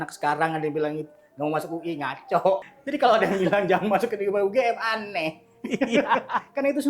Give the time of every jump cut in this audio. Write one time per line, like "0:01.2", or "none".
0:02.8